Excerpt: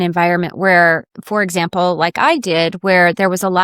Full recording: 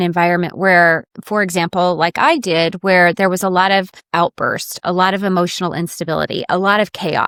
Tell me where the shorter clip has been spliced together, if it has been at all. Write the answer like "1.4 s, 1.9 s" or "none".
none